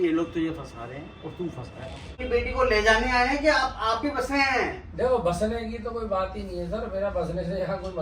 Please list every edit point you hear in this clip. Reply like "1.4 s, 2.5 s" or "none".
2.2 s

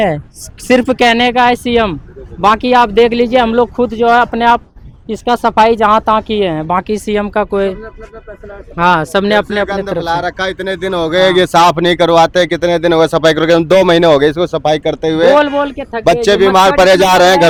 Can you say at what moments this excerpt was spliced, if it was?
none

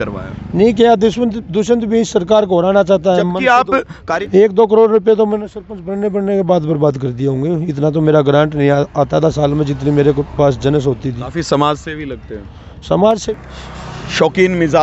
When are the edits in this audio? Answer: 4.0 s, 13.3 s

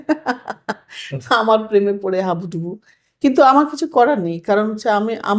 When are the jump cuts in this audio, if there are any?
none

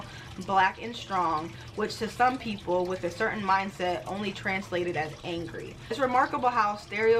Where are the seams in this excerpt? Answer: 5.8 s

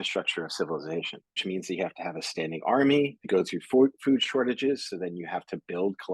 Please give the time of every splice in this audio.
1.4 s, 3.2 s

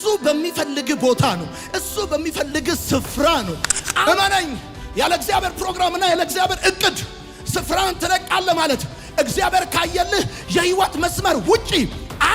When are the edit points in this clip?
4.0 s

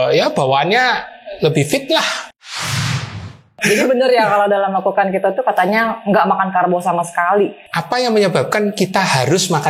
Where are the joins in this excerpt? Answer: 3.6 s, 7.7 s

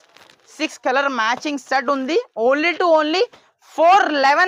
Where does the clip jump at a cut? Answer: none

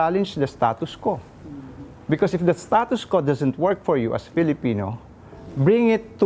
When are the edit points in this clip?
none

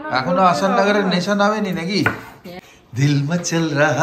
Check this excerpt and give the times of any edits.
2.6 s

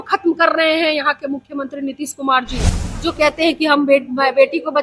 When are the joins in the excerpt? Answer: 3.0 s

